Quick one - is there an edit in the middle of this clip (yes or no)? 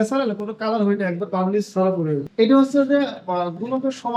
yes